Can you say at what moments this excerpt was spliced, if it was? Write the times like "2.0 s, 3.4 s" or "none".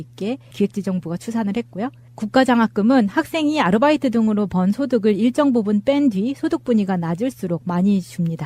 2.5 s

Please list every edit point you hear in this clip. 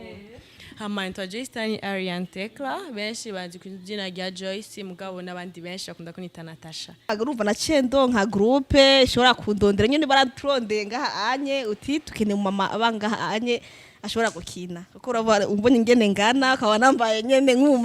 7.1 s

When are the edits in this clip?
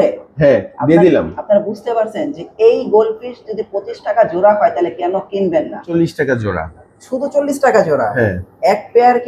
5.8 s

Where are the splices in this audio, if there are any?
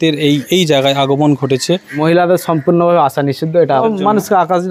2.0 s, 3.8 s

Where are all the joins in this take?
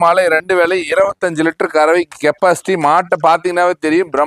none

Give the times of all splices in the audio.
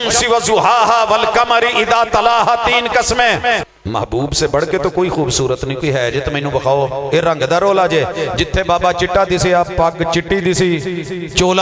3.6 s

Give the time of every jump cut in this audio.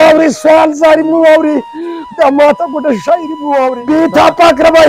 3.8 s

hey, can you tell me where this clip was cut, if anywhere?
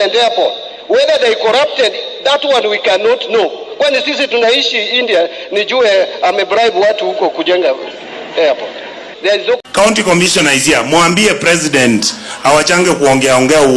9.6 s

